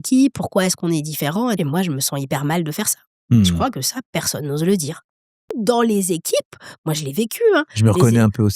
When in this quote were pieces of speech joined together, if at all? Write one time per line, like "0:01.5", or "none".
0:01.6
0:05.5